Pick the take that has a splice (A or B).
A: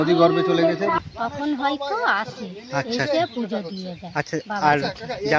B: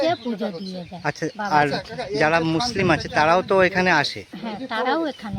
A